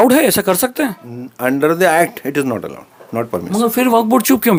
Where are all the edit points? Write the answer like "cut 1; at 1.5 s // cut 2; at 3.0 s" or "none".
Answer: none